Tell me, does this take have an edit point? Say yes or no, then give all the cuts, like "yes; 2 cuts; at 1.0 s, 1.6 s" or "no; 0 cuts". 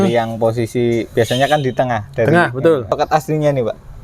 yes; 1 cut; at 2.9 s